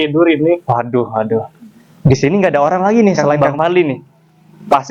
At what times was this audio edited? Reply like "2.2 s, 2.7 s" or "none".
none